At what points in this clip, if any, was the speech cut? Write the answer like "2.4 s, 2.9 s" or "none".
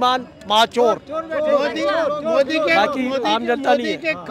none